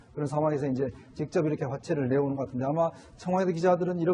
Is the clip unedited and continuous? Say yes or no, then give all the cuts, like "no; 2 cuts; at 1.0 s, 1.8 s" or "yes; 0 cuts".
no; 1 cut; at 2.3 s